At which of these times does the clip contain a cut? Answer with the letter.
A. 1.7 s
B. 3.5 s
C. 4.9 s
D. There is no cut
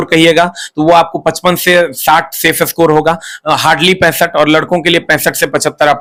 D